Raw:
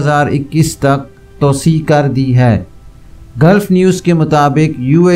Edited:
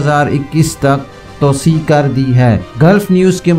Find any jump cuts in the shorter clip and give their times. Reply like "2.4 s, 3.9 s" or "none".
2.7 s